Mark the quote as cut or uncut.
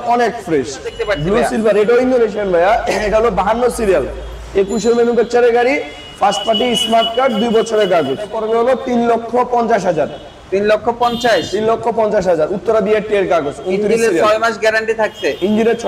cut